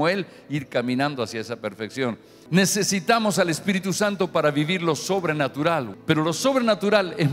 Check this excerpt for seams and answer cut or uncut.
cut